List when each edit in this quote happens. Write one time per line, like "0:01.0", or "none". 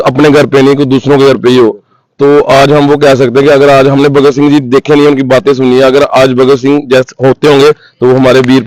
none